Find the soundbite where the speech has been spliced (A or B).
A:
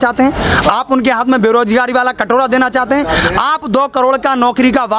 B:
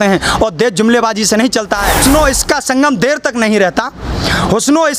B